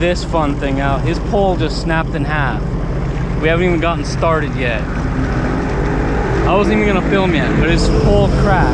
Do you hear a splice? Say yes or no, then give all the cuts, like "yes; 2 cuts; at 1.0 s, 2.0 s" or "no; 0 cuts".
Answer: no; 0 cuts